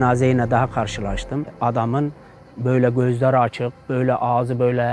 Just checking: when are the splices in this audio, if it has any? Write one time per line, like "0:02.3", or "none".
0:01.5